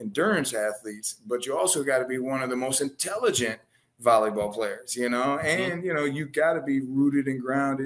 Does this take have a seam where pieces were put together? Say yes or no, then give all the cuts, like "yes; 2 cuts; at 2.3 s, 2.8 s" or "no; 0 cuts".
no; 0 cuts